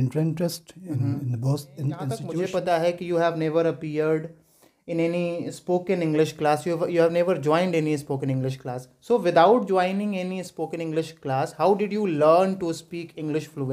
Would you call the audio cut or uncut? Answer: cut